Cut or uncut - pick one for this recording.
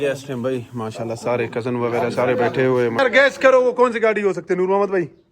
cut